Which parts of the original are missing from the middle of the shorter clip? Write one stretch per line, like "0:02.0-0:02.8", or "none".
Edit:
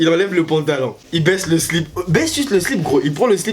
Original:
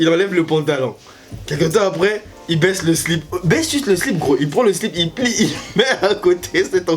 0:01.0-0:02.4

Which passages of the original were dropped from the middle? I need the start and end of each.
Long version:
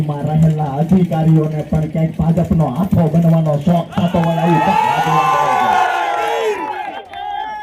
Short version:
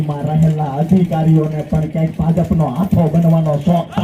none

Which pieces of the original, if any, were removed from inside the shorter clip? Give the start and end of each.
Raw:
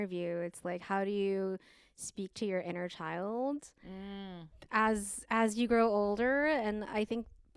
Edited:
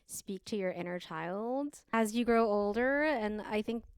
0:03.8-0:05.4

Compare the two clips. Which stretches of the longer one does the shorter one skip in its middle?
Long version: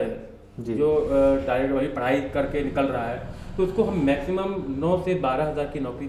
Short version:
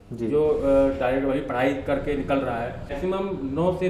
0:03.4-0:04.2

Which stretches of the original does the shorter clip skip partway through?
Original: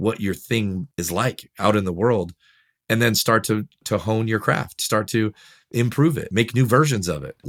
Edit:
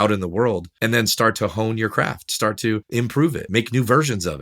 0:02.8-0:03.7
0:05.8-0:06.1

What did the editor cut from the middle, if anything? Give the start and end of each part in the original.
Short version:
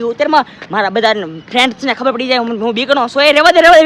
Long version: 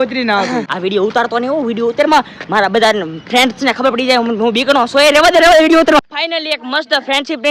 none

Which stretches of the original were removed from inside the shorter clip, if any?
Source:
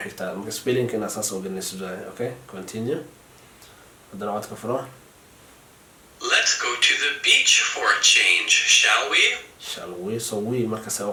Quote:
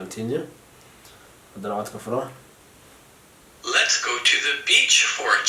none

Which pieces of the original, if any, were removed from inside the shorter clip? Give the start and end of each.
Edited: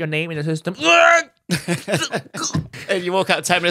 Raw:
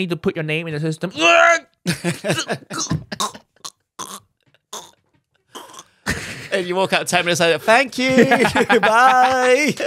0:03.1-0:06.4

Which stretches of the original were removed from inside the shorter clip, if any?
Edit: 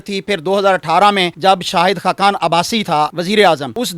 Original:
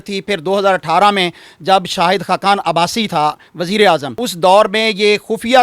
0:01.3-0:01.6
0:03.4-0:03.6

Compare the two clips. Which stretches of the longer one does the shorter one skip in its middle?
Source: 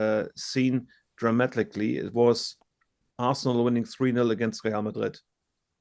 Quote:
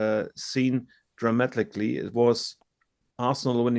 none

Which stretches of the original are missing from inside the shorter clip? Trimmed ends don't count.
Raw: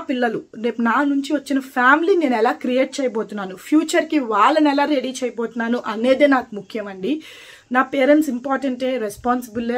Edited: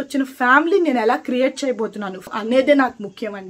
0:03.6-0:05.8

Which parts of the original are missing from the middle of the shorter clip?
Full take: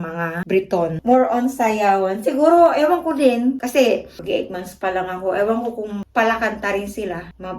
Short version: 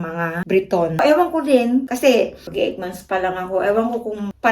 0:01.0-0:02.7

